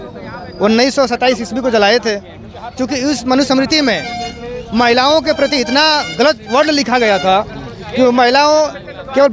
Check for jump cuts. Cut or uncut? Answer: uncut